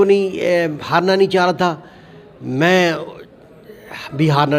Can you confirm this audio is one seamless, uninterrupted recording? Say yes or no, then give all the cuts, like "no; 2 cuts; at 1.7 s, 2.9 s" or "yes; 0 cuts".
yes; 0 cuts